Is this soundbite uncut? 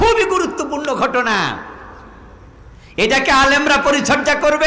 yes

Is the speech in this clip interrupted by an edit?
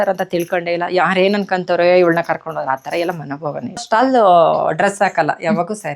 yes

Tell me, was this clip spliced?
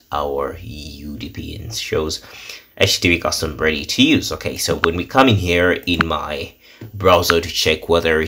no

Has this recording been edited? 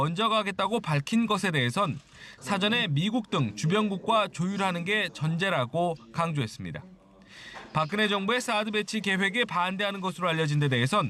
no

